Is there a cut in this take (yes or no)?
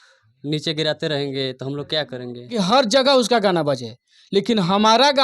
yes